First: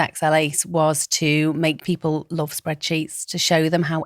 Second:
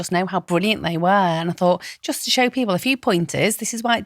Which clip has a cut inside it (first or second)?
first